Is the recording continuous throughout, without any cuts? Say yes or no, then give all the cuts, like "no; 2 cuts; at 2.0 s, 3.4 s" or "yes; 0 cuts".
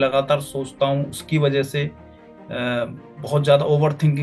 yes; 0 cuts